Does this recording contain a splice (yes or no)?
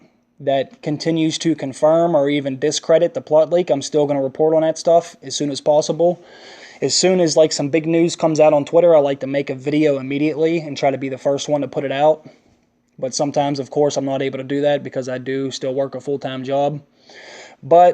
yes